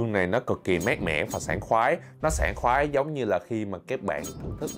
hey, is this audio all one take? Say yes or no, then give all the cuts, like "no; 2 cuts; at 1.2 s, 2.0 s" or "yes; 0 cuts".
yes; 0 cuts